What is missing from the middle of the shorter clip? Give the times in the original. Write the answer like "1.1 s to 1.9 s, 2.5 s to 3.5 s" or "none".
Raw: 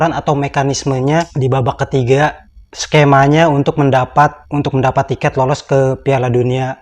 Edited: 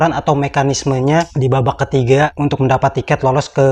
2.4 s to 4.5 s